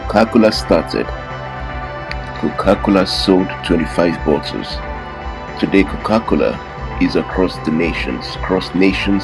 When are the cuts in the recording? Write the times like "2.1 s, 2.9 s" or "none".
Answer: none